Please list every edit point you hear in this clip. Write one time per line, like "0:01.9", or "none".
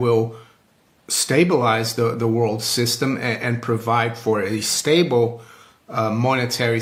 none